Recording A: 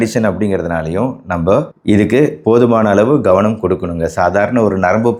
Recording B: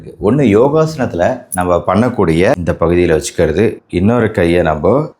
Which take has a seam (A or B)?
B